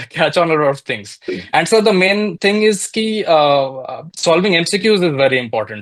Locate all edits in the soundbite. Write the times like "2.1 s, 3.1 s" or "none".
none